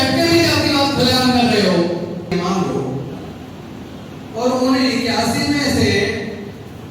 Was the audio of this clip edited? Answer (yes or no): yes